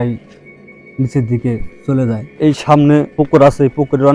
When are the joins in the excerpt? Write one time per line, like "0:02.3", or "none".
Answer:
0:02.3
0:03.1